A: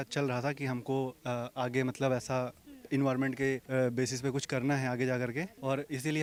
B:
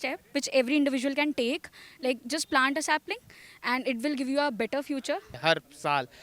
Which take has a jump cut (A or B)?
B